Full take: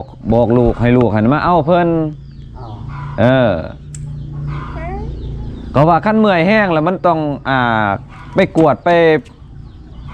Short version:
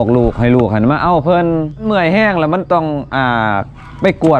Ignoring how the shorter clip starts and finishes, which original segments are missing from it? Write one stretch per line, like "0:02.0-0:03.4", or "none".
0:02.3-0:06.2